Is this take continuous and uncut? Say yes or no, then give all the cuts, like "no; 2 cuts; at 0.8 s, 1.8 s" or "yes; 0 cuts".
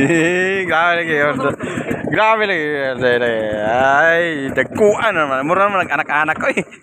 yes; 0 cuts